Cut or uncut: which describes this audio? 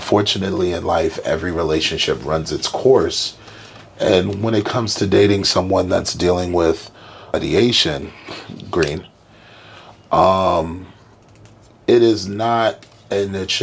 cut